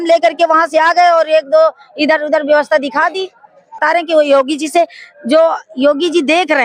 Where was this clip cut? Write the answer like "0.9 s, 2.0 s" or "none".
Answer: 3.8 s